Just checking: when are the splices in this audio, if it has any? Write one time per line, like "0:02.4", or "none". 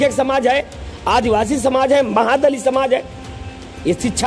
none